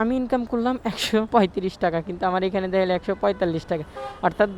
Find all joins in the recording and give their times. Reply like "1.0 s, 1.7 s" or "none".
1.3 s